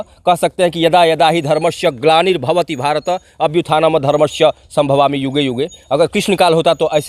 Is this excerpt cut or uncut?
uncut